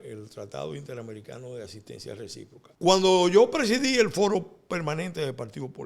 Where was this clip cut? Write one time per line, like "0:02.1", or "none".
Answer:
0:02.6